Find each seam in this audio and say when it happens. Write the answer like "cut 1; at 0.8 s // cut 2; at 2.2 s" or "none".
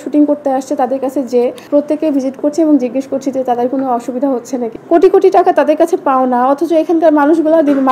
cut 1; at 1.6 s // cut 2; at 4.7 s

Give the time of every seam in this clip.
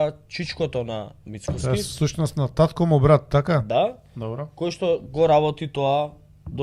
cut 1; at 1.3 s

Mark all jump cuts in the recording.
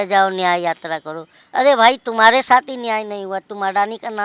none

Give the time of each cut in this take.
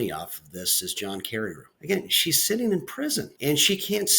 cut 1; at 1.7 s // cut 2; at 3.3 s

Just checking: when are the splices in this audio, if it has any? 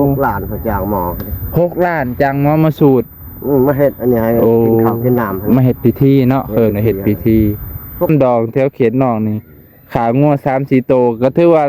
cut 1; at 8.1 s

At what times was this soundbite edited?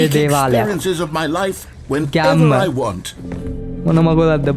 cut 1; at 3.5 s

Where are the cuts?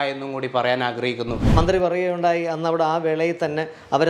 cut 1; at 1.4 s

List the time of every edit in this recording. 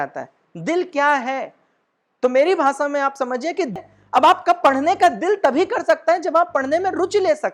cut 1; at 3.8 s

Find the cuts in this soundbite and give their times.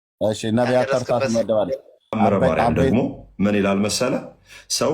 cut 1; at 2.8 s

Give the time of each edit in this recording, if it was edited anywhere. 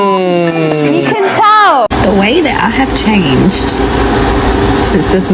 cut 1; at 1.9 s

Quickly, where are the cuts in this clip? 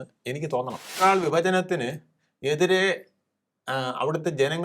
cut 1; at 1.0 s

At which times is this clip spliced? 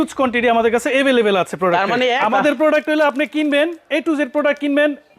cut 1; at 2.2 s

